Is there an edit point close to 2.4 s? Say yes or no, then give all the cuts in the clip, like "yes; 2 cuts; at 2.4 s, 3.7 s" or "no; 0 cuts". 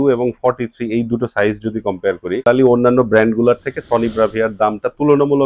yes; 1 cut; at 2.4 s